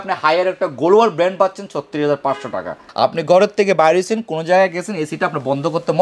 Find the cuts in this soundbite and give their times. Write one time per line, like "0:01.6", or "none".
0:02.9